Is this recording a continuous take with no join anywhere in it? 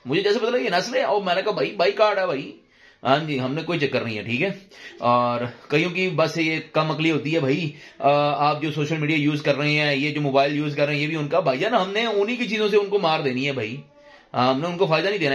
yes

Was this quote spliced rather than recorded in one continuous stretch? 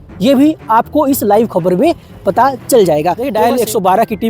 yes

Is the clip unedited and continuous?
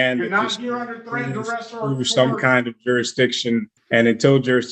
no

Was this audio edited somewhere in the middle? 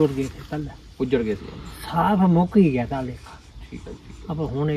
no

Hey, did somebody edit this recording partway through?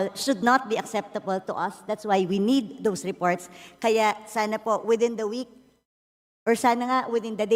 no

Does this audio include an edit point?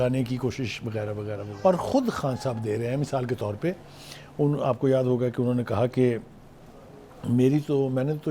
yes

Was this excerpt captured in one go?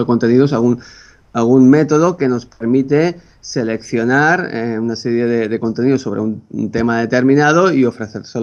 yes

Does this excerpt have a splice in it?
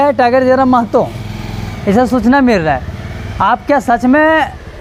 no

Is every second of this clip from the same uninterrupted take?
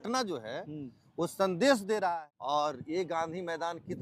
no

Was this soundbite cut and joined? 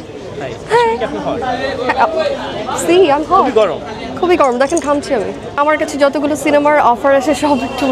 yes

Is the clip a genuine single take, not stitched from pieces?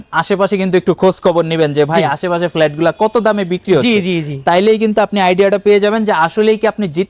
yes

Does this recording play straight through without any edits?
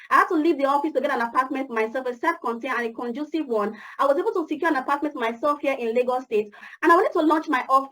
no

